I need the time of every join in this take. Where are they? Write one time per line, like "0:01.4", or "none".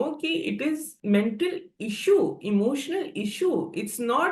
0:00.9